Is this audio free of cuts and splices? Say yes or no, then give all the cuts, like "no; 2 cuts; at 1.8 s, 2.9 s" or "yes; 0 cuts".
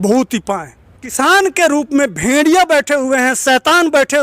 no; 1 cut; at 1.1 s